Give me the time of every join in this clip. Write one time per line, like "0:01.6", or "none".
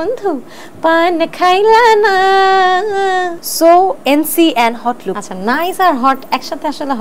0:03.4
0:05.1